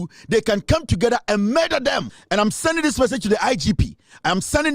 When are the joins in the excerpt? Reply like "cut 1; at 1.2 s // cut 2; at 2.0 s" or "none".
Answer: cut 1; at 2.1 s